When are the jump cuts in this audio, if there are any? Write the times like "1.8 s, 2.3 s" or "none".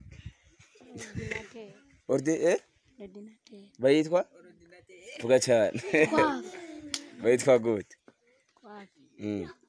none